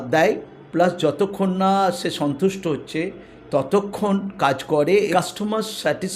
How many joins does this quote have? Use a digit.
1